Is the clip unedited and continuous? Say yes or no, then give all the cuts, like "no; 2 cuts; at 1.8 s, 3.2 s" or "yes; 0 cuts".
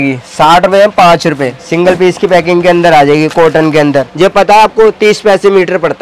no; 2 cuts; at 1.6 s, 4.1 s